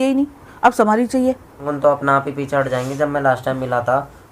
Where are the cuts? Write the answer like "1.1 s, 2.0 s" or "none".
1.6 s